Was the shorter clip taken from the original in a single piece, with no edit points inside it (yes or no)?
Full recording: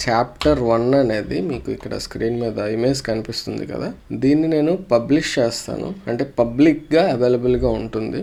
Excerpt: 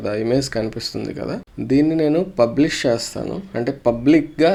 yes